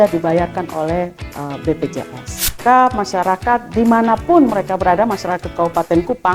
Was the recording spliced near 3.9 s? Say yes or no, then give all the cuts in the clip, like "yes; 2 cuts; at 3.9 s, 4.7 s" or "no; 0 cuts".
no; 1 cut; at 2.6 s